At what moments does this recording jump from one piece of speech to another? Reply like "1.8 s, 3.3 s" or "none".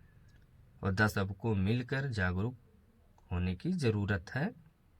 1.1 s